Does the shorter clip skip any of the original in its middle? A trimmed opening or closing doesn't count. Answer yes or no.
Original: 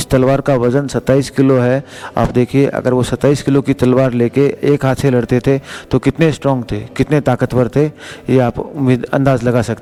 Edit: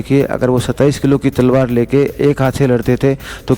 no